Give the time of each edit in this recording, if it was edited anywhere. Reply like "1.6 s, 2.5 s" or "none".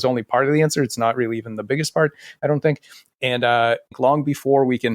3.9 s